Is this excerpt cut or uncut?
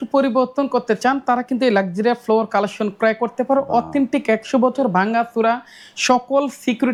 uncut